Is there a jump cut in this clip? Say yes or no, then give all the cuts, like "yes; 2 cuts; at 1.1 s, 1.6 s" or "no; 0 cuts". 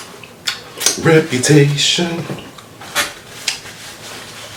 no; 0 cuts